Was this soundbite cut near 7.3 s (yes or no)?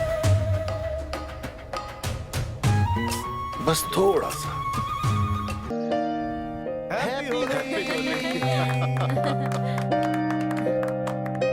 no